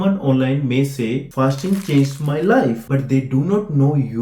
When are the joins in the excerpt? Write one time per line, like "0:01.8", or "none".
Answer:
none